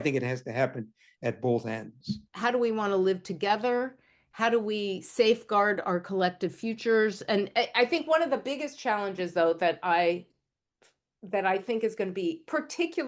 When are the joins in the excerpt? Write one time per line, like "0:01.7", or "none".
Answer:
0:02.3

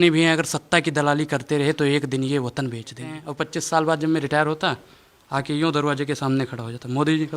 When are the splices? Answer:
0:03.2

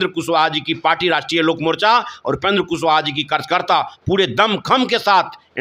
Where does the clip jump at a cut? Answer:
none

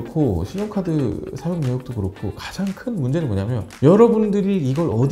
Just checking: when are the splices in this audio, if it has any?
none

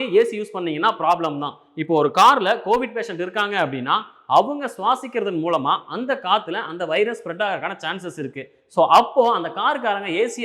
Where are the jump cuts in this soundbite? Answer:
none

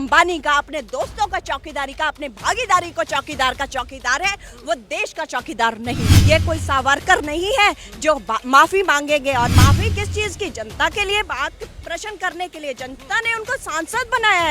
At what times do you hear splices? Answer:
0:06.1

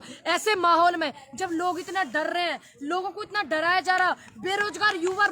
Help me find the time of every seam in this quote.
none

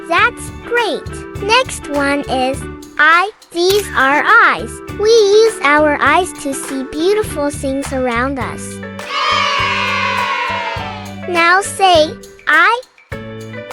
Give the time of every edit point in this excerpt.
0:01.4

